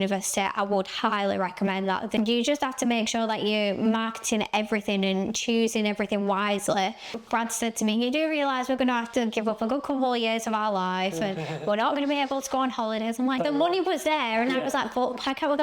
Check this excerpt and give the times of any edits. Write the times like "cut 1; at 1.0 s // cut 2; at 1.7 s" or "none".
cut 1; at 2.1 s // cut 2; at 7.1 s // cut 3; at 13.4 s